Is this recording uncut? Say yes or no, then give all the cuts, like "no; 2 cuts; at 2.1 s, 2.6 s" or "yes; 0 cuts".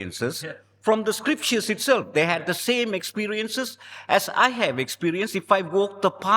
yes; 0 cuts